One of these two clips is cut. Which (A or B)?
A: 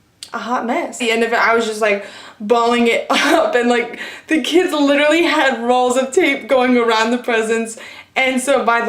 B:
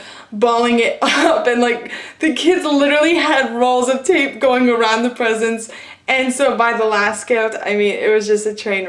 A